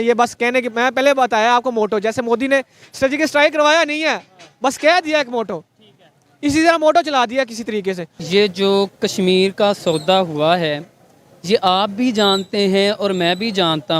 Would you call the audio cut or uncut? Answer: cut